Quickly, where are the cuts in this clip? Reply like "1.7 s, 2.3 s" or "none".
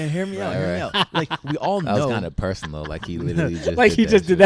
none